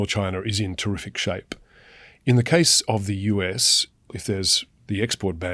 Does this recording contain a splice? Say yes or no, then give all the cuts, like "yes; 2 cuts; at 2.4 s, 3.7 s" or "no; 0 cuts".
yes; 1 cut; at 4.2 s